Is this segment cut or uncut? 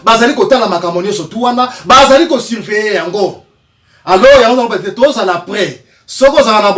uncut